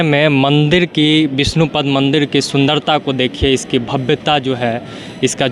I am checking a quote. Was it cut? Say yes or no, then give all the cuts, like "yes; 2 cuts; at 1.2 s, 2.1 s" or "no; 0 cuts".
no; 0 cuts